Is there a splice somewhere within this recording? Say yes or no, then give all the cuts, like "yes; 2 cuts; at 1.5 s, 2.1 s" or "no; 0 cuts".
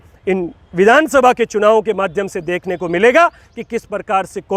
no; 0 cuts